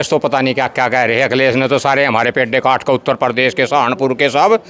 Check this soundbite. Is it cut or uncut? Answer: uncut